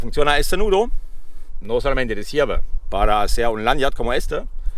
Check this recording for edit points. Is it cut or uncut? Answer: uncut